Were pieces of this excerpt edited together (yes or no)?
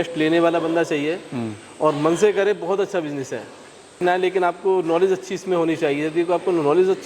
yes